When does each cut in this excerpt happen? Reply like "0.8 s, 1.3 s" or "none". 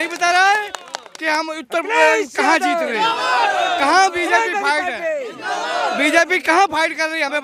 none